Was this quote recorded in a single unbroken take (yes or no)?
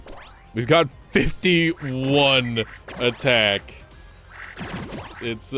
yes